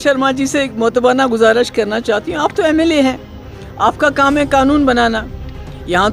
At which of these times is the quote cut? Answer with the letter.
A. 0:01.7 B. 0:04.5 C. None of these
C